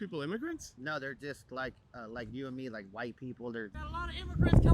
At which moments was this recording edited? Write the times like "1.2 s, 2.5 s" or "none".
3.8 s